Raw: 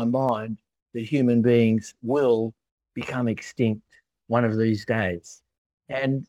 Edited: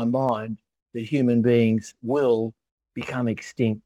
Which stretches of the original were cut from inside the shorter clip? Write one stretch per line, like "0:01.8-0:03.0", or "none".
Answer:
none